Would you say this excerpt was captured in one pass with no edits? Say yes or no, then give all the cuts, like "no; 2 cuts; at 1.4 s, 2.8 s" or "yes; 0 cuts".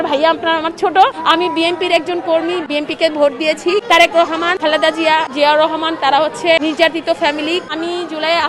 no; 6 cuts; at 1.2 s, 2.7 s, 3.8 s, 5.0 s, 6.6 s, 7.7 s